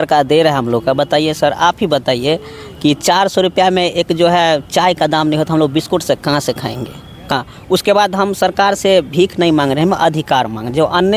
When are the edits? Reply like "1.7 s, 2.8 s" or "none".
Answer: 7.3 s